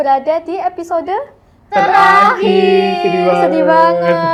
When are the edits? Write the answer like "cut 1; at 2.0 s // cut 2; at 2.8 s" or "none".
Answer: none